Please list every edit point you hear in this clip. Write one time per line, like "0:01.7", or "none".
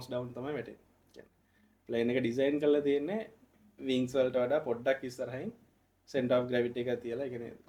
none